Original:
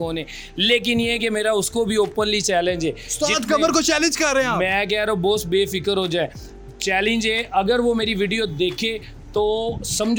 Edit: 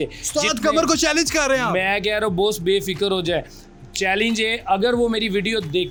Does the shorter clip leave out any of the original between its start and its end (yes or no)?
no